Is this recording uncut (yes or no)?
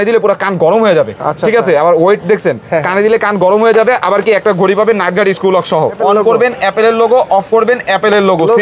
no